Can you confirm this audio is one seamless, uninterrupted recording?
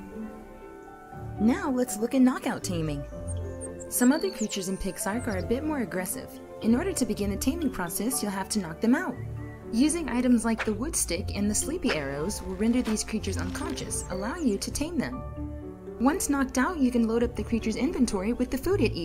no; 1 cut; at 12.5 s

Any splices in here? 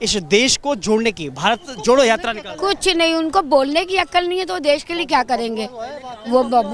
no; 0 cuts

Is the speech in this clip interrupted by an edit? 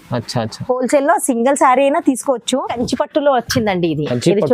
yes; 1 cut; at 2.7 s

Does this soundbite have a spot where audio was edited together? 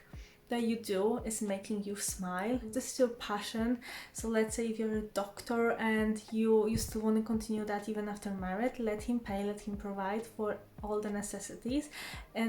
yes; 1 cut; at 2.7 s

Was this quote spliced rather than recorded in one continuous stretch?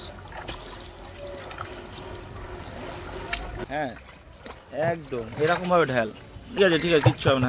yes; 2 cuts; at 3.5 s, 6.6 s

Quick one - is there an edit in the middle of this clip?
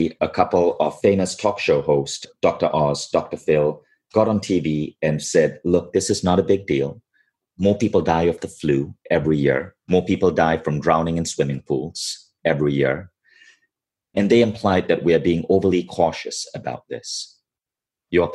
no; 0 cuts

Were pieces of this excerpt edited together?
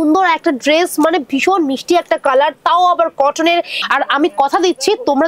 yes; 1 cut; at 3.7 s

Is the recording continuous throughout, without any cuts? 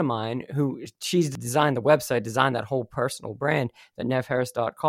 no; 1 cut; at 1.3 s

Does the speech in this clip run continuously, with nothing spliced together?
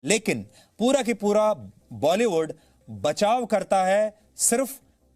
yes; 0 cuts

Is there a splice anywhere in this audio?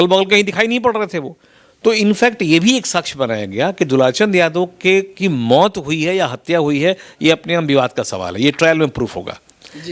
no; 0 cuts

